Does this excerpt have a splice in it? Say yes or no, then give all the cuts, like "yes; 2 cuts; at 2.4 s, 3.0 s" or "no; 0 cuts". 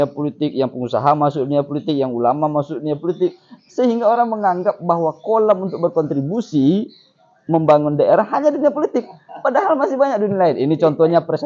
no; 0 cuts